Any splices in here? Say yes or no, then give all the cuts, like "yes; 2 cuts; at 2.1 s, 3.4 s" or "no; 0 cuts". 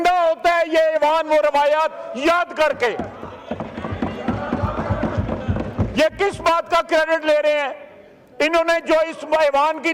no; 0 cuts